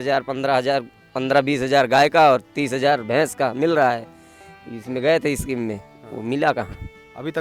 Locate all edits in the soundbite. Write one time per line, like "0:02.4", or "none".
none